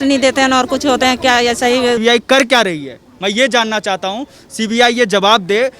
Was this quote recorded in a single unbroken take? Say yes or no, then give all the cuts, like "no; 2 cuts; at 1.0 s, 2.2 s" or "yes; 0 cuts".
no; 1 cut; at 2.0 s